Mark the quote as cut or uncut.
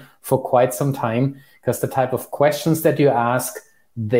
uncut